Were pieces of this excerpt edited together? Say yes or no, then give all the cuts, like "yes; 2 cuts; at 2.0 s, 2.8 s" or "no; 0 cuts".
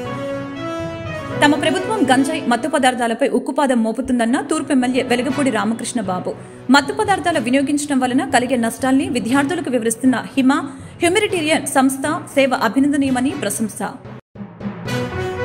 yes; 1 cut; at 0.9 s